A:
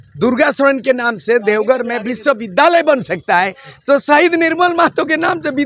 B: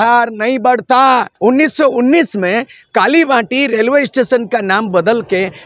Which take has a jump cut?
B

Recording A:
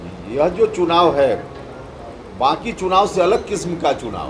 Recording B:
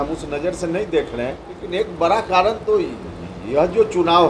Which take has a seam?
B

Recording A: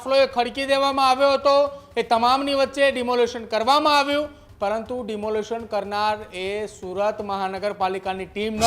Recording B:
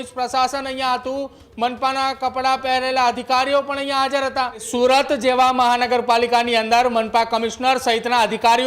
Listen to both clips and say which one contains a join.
B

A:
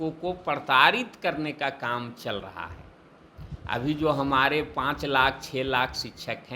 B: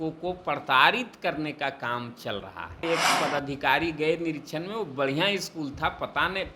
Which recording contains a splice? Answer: B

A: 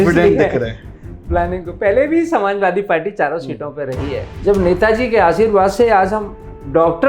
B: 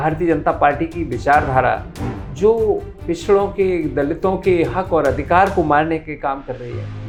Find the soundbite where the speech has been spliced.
A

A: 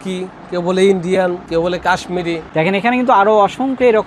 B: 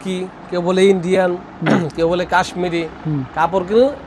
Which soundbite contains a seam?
A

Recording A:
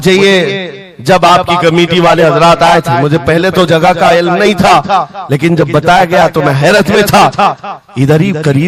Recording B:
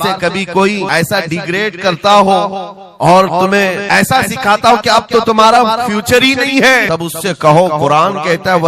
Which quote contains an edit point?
B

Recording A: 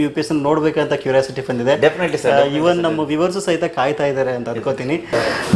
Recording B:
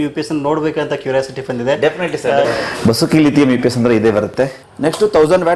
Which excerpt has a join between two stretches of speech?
B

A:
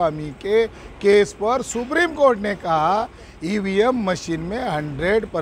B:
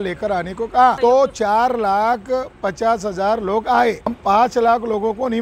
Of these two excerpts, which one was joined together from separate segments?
B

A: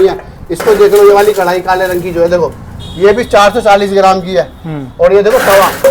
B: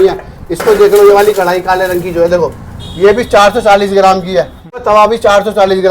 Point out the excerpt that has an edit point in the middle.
B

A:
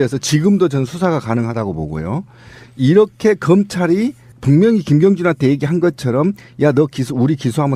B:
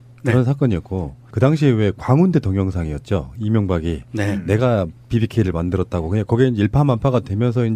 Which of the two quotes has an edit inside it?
B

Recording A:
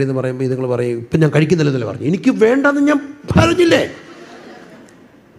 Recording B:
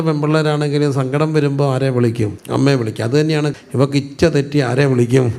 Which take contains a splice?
B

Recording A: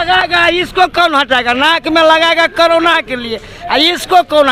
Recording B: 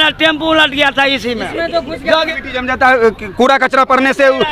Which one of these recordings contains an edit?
B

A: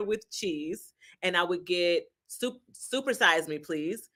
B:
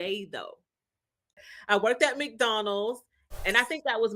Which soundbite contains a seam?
B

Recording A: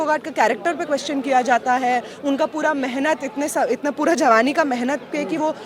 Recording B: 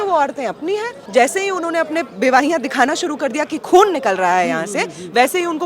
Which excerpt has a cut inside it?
B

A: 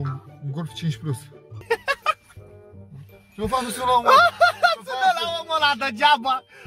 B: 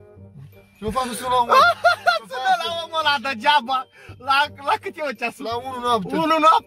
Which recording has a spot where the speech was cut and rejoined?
A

